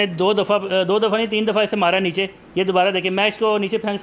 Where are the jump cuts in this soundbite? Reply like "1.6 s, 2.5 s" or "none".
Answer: none